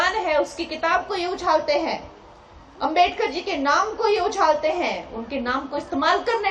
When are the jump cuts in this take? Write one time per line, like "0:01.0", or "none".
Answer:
none